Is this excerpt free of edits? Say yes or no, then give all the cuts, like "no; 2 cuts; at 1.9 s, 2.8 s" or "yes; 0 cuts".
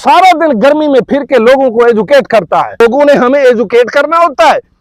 no; 1 cut; at 2.8 s